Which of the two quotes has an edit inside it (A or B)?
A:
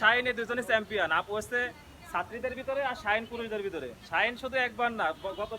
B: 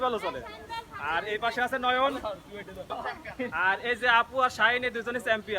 B